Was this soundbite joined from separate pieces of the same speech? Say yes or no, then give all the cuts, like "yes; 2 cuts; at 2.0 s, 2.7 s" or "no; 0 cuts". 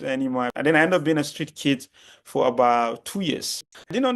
no; 0 cuts